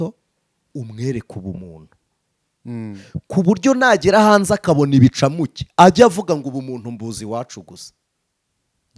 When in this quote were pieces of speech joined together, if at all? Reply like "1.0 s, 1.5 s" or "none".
none